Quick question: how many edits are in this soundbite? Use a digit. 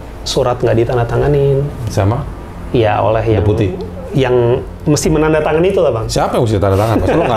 0